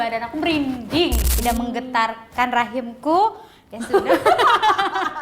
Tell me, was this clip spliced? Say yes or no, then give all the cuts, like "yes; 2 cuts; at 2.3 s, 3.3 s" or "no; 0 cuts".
yes; 1 cut; at 1.3 s